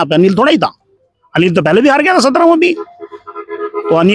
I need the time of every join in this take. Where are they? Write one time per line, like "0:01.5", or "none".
none